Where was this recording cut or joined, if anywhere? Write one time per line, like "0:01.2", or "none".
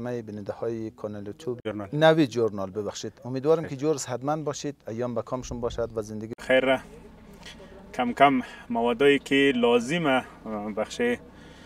0:01.6
0:06.4

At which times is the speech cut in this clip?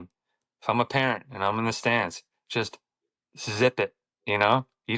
none

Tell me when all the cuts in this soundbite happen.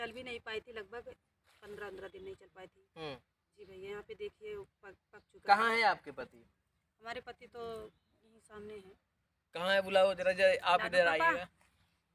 none

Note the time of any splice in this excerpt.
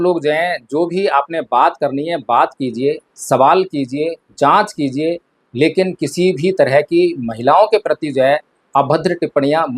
none

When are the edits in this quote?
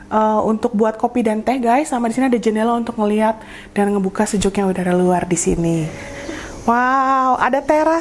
0:06.0

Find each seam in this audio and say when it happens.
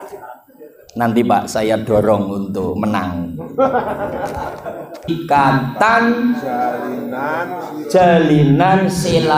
0:05.1

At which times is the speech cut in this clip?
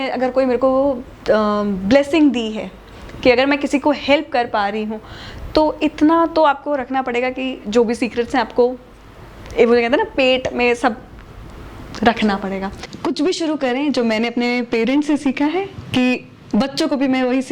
0:12.7

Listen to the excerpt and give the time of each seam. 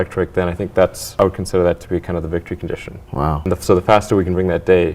0:01.0
0:03.5

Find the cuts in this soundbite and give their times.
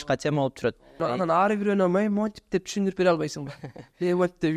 0:01.0

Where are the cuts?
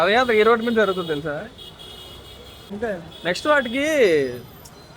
0:02.7

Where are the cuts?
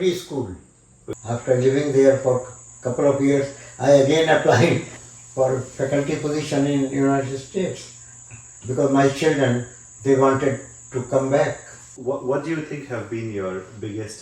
0:01.1
0:05.0
0:11.9

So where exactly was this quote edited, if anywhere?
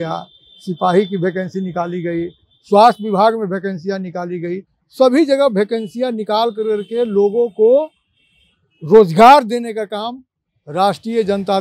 none

